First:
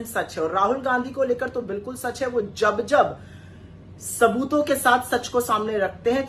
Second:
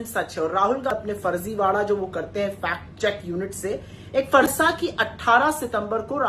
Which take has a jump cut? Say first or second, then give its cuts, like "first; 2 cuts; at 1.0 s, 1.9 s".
second; 2 cuts; at 0.9 s, 4.4 s